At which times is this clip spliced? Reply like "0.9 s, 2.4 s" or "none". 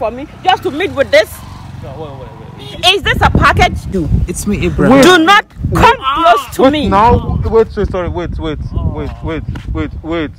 4.0 s

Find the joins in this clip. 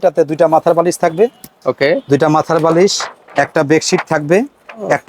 none

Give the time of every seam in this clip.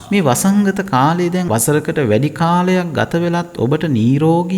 1.5 s

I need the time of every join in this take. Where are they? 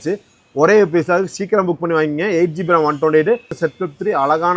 3.6 s

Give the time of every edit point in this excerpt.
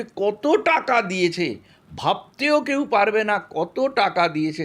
none

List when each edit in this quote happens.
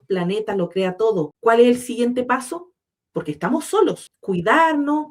1.3 s, 4.1 s

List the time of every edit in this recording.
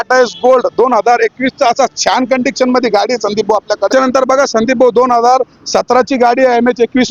3.9 s

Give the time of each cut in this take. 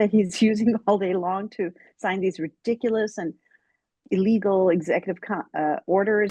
none

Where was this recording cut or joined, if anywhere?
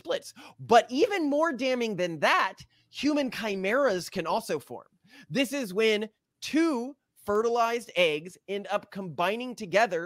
none

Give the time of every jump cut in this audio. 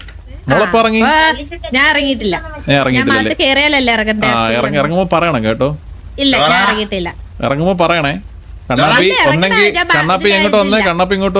none

